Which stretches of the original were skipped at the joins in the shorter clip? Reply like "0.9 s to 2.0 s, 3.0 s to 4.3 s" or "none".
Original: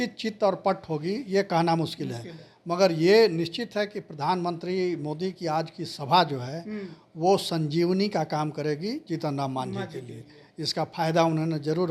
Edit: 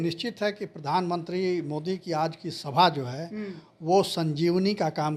none